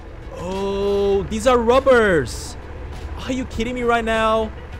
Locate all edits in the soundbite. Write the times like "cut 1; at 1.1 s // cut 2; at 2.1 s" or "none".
none